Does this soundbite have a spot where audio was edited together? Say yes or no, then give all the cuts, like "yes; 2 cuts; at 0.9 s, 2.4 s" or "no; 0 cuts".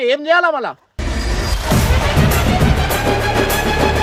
no; 0 cuts